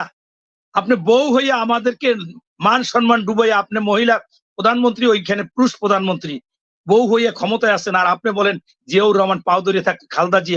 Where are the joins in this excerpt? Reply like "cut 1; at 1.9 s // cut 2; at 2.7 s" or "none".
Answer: none

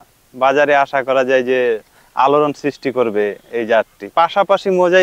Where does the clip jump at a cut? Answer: cut 1; at 4.1 s

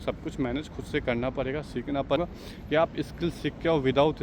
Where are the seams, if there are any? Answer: cut 1; at 2.2 s

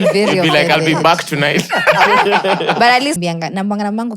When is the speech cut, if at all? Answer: cut 1; at 3.2 s

